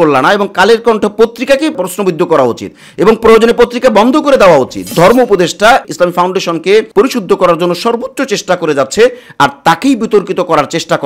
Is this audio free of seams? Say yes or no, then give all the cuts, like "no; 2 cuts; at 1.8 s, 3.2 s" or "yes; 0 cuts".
no; 1 cut; at 4.8 s